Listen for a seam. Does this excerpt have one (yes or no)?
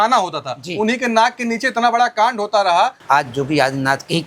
yes